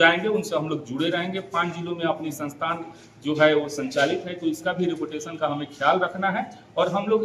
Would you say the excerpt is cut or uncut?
uncut